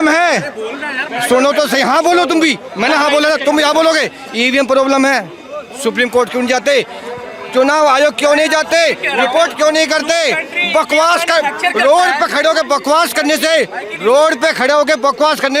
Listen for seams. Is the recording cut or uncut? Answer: uncut